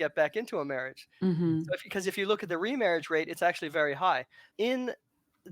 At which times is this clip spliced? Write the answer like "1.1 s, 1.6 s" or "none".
4.5 s